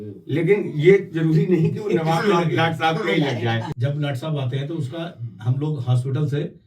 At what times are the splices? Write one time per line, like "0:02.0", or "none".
0:03.7